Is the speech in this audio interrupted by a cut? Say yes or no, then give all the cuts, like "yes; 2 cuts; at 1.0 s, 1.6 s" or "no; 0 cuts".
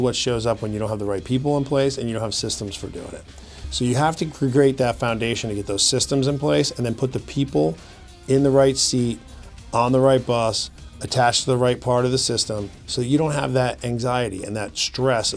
no; 0 cuts